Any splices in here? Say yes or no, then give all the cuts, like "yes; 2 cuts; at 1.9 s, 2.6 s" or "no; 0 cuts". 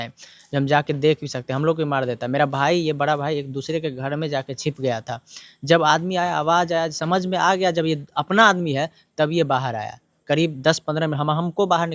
no; 0 cuts